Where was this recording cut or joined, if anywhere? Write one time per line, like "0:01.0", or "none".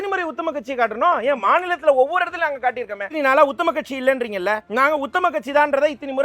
0:01.4
0:03.0
0:04.7